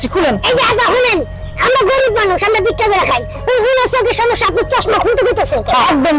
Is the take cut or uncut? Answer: uncut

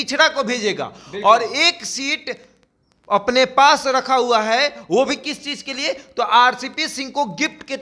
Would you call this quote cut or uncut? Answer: uncut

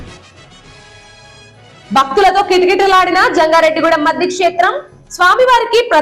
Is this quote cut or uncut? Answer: cut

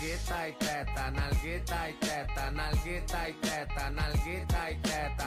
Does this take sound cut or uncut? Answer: uncut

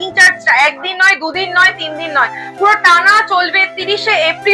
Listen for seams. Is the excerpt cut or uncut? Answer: uncut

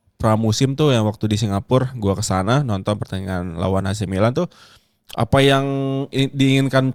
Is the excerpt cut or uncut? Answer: uncut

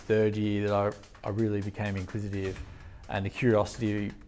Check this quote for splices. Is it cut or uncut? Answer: uncut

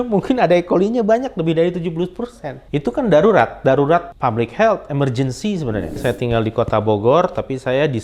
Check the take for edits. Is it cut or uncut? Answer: cut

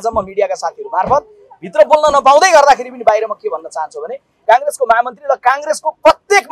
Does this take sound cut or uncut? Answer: cut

